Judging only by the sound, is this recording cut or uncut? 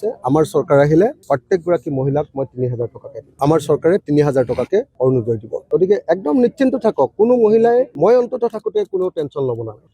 uncut